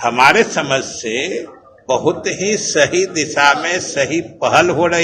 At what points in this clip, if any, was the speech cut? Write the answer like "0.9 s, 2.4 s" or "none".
none